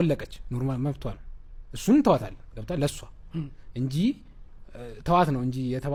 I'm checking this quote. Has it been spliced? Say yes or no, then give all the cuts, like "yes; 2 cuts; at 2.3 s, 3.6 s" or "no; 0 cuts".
no; 0 cuts